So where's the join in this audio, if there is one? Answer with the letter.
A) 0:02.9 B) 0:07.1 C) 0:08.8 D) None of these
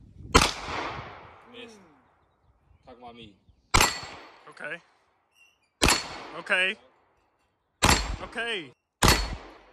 C